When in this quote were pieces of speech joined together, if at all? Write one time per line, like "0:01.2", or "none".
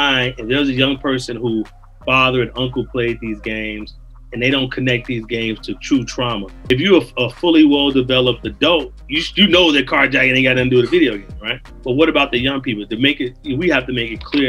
0:06.5
0:11.7

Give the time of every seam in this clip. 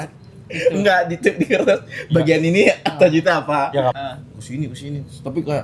0:04.0

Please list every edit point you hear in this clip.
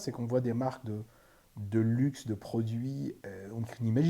0:03.2

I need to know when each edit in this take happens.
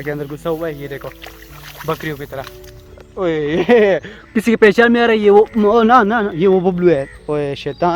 none

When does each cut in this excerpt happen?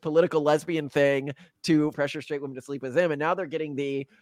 0:01.9

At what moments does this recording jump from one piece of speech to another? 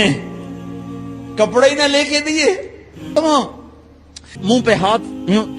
0:03.1

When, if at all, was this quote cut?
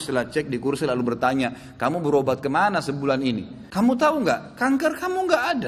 0:03.6

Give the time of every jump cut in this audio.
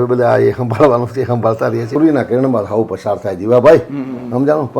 0:01.9

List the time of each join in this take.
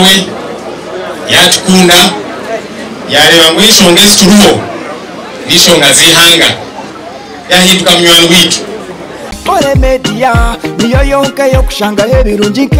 0:09.4

